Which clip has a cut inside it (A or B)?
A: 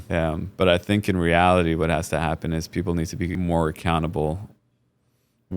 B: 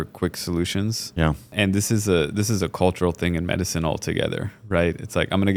A